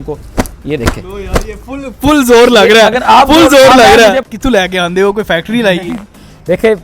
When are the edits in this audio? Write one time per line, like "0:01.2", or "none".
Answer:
0:04.3

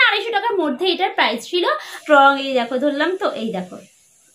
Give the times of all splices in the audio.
0:01.9

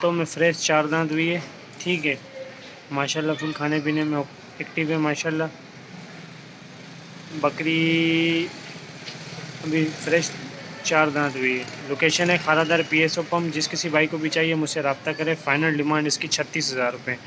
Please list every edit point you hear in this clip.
none

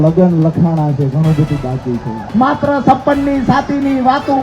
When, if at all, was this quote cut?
0:02.3

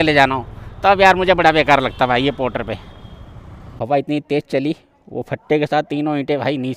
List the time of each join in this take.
0:03.8

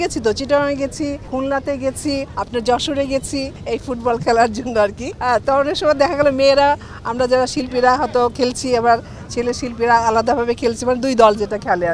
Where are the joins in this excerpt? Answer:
0:01.2
0:02.3
0:03.5
0:05.1

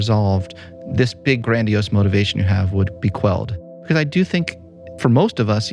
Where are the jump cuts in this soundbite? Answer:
0:01.4
0:03.8
0:04.9

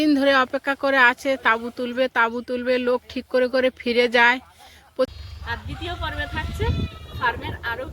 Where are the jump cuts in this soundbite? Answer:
0:05.1

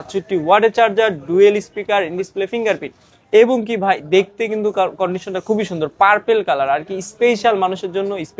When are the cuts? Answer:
none

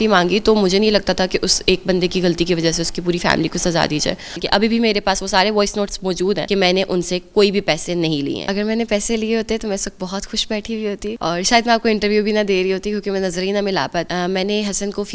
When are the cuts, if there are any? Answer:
0:04.4
0:06.4
0:08.4
0:11.2
0:14.1

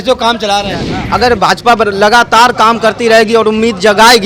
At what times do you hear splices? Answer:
0:01.0

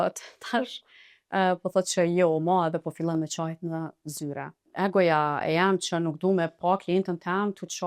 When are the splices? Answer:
0:04.5

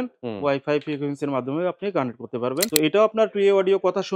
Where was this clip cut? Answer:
0:02.7

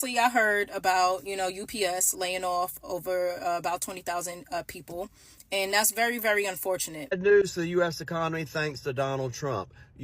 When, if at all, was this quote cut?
0:06.9

